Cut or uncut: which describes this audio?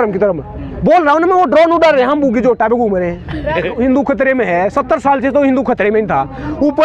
cut